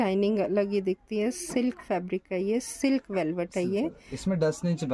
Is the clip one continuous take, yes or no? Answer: yes